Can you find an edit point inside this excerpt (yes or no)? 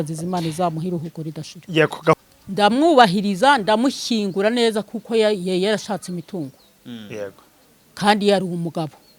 yes